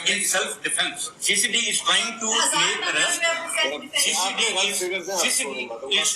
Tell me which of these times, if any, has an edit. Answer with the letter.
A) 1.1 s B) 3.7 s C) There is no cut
A